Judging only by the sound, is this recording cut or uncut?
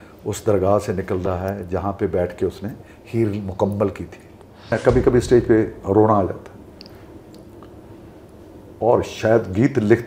cut